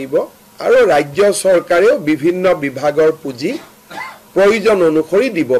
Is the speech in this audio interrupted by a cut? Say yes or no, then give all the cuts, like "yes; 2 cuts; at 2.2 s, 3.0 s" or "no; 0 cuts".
no; 0 cuts